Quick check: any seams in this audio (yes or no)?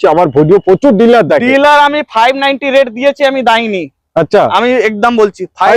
no